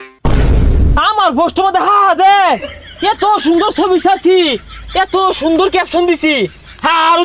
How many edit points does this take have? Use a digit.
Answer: 1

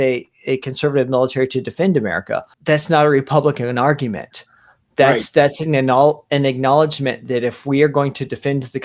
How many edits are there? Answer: 1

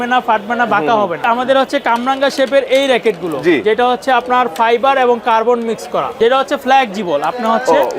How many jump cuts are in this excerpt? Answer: 2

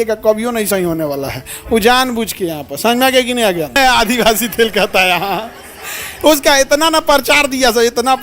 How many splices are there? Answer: 1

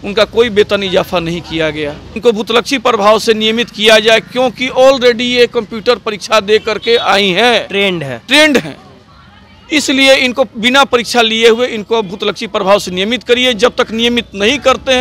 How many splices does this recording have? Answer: 1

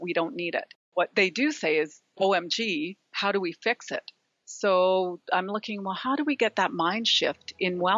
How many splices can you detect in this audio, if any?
1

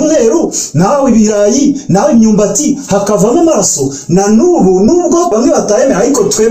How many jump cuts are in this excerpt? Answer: 1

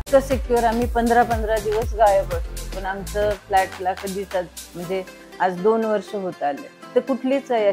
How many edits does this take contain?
0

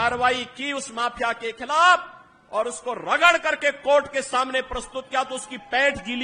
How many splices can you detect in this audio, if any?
0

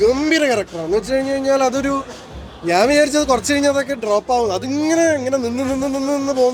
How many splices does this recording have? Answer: 0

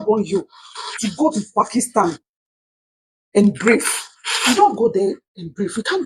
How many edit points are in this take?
0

